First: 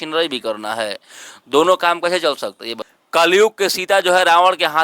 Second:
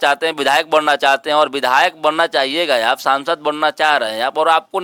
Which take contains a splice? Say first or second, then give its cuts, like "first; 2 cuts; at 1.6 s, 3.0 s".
first; 1 cut; at 3.0 s